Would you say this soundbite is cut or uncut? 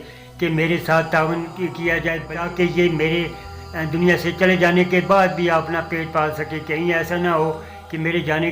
cut